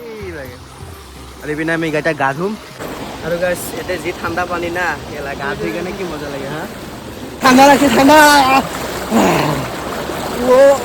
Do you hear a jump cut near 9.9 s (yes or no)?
no